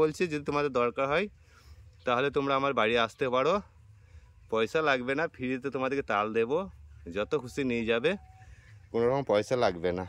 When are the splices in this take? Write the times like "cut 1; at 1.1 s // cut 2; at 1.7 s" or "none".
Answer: none